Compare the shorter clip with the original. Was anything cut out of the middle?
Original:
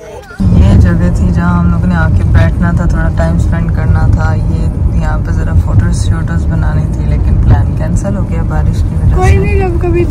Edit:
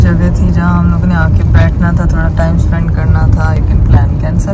yes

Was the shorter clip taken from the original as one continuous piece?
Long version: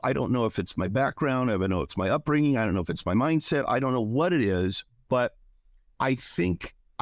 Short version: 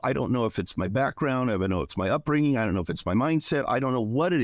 yes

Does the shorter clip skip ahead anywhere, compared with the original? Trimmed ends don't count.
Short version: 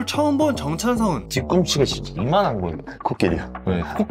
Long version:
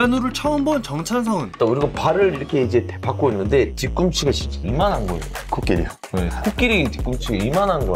yes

